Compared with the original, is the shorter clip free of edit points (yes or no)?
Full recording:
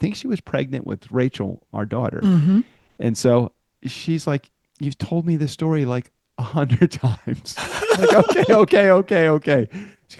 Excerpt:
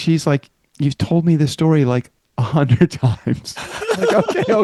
yes